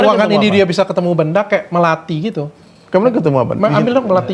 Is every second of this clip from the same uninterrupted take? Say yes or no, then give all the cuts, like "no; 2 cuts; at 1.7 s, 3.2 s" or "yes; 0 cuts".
yes; 0 cuts